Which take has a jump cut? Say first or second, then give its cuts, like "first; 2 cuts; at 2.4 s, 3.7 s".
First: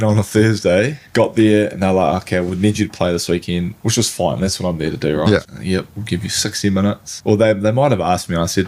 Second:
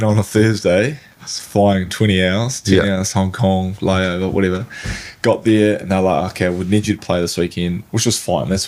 first; 3 cuts; at 1.0 s, 5.5 s, 7.1 s